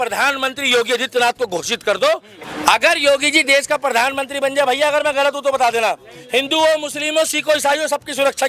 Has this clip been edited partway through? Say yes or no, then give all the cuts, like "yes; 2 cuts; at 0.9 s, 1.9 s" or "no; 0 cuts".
no; 0 cuts